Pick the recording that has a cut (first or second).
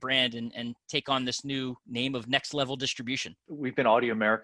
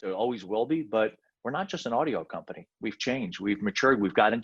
first